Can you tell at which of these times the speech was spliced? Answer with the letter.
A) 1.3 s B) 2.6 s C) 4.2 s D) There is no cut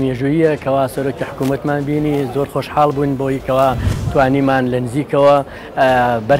D